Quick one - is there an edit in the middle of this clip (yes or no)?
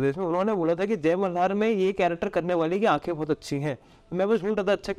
no